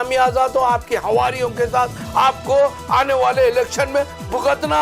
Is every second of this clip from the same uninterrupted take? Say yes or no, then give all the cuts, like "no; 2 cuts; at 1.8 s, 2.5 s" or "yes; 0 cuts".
yes; 0 cuts